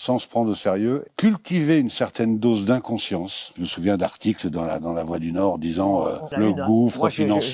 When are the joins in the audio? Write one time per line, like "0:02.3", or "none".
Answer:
0:01.1
0:03.6
0:06.2